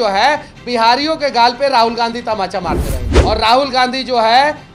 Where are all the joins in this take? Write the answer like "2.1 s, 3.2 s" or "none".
3.1 s